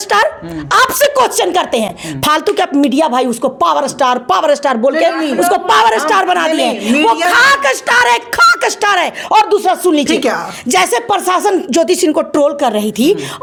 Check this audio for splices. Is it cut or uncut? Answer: uncut